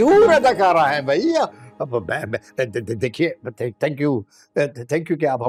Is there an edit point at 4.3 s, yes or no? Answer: no